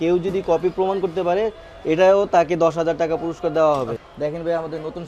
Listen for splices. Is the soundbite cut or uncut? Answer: cut